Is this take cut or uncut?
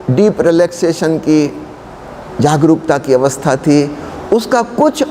uncut